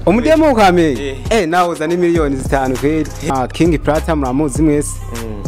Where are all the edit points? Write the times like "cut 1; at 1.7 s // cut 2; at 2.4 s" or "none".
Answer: cut 1; at 3.3 s